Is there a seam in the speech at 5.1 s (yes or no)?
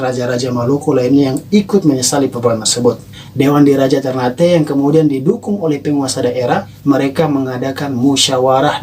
no